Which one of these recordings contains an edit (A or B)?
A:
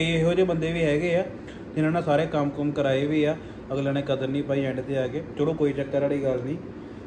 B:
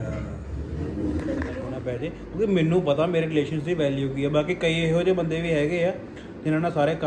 B